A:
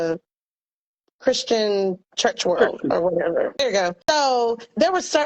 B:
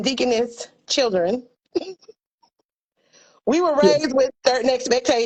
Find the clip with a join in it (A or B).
A